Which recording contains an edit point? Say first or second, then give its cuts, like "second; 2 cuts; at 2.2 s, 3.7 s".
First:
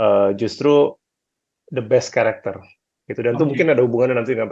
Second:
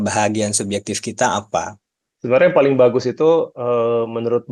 second; 1 cut; at 1.7 s